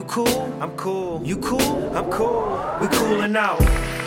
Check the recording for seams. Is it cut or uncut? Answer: uncut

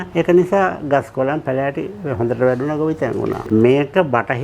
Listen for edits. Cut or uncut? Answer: cut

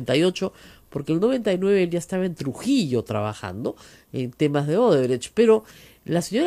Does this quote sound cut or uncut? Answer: uncut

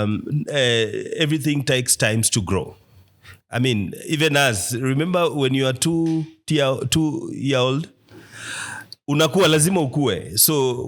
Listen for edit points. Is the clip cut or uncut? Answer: uncut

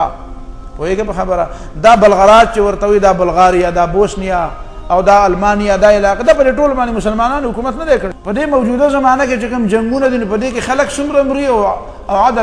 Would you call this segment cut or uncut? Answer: cut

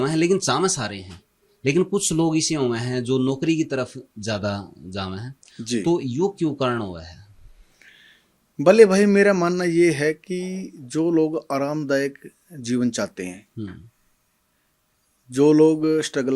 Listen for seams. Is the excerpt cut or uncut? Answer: uncut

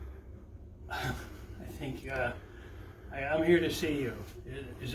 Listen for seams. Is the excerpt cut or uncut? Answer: uncut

